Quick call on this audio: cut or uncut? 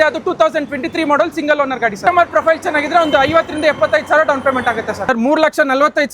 cut